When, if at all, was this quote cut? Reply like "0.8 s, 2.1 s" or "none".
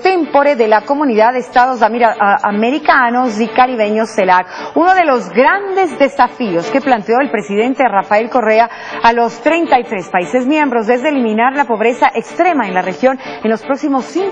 none